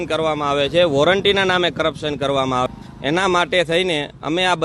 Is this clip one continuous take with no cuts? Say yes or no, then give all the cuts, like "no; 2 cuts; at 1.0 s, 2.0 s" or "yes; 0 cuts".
no; 1 cut; at 2.7 s